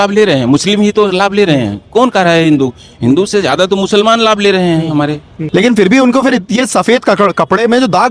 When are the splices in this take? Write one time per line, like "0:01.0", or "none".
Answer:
none